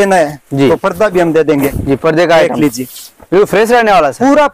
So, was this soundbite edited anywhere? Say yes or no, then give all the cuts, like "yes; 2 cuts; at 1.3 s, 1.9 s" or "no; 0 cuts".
no; 0 cuts